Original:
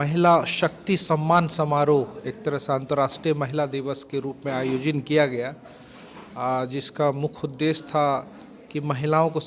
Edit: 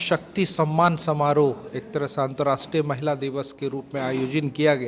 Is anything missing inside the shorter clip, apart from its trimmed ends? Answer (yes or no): no